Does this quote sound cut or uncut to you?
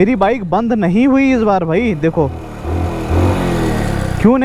uncut